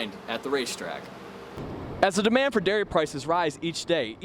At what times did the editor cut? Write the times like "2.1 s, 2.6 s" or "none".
1.5 s